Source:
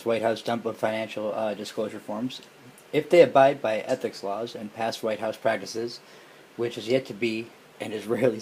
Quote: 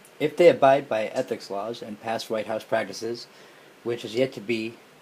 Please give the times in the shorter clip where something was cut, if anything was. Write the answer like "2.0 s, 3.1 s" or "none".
none

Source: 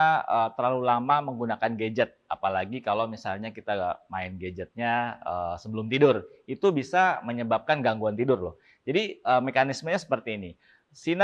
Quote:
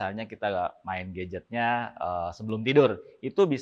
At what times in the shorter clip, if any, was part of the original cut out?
none

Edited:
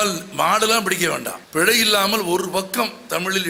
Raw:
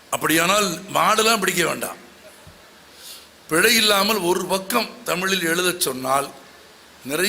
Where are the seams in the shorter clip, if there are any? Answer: 1.4 s

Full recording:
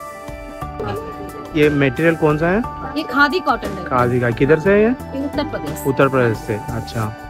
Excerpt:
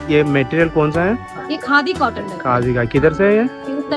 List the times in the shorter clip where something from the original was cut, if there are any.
none

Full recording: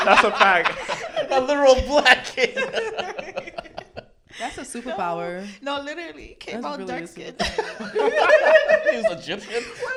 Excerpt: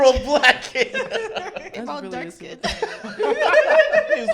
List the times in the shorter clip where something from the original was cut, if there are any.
1.7 s

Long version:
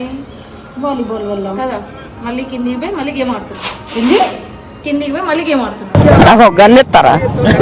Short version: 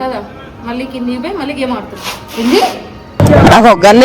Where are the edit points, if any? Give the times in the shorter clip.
3.0 s

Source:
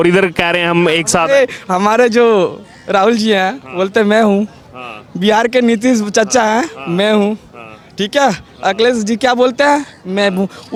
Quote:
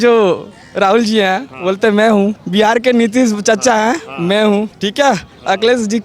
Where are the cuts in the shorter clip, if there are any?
2.4 s, 4.8 s

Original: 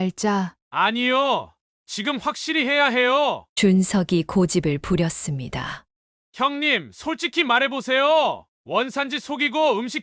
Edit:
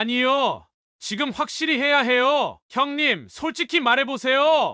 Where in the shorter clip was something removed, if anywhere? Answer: 2.6 s

